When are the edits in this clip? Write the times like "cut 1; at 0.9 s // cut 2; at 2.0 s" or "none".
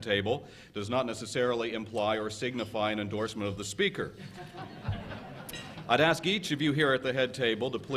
cut 1; at 4.4 s